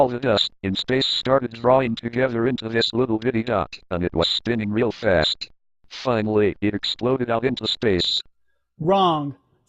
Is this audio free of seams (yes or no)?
no